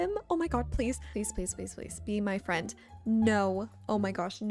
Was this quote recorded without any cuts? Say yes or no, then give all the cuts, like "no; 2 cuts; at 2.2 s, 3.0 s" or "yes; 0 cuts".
yes; 0 cuts